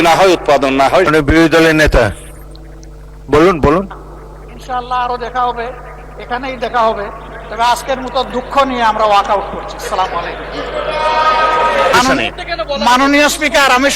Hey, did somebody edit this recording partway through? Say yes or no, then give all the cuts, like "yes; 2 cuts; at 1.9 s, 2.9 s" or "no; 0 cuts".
yes; 2 cuts; at 1.1 s, 11.9 s